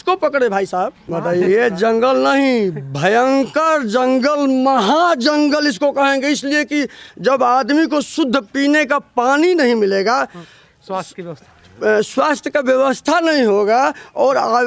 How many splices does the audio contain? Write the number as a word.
one